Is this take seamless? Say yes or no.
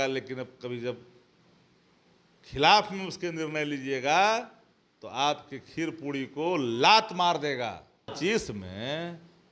no